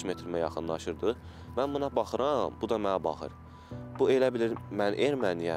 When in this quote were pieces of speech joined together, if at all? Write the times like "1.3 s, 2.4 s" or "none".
none